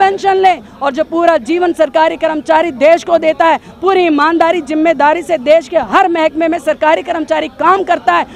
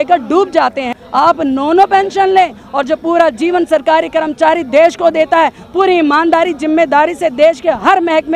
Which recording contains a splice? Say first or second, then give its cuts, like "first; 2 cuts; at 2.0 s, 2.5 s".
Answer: second; 1 cut; at 0.9 s